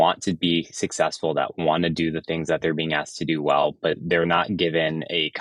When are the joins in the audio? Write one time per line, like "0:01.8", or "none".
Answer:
none